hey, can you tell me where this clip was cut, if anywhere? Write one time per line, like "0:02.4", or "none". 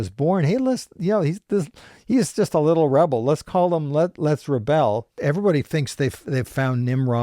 0:05.1